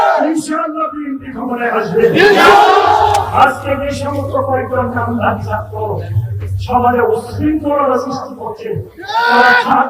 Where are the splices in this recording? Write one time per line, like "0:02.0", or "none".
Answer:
0:03.3